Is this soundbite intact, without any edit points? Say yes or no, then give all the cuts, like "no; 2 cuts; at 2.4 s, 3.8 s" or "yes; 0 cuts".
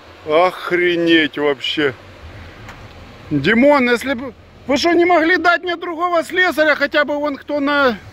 yes; 0 cuts